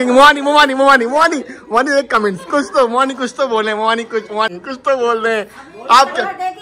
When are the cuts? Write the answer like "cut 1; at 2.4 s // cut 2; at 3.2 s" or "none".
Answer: none